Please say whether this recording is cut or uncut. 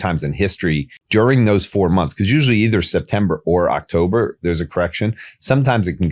cut